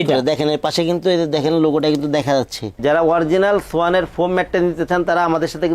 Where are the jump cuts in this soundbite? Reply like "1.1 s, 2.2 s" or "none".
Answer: 2.7 s